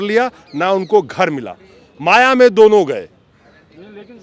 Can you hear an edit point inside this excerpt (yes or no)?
no